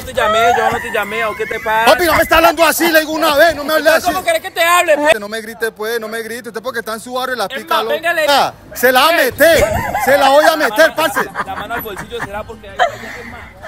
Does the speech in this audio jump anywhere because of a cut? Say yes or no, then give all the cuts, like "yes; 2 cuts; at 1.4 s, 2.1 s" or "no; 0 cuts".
yes; 2 cuts; at 5.1 s, 8.3 s